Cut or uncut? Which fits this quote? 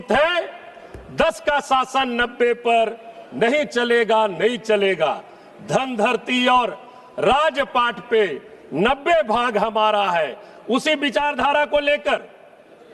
uncut